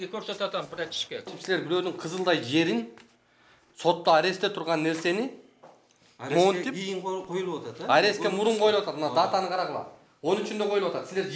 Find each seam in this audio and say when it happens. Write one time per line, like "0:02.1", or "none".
0:01.3